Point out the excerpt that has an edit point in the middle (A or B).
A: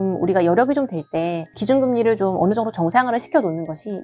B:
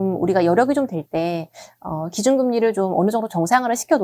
A